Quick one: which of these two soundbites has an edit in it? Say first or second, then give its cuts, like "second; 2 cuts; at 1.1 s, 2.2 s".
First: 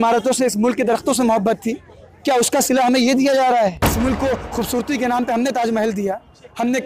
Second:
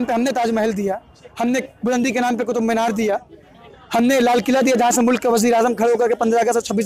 first; 1 cut; at 3.8 s